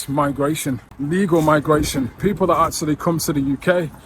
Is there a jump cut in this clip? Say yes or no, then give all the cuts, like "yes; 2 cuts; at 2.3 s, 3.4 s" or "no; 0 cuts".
yes; 1 cut; at 0.9 s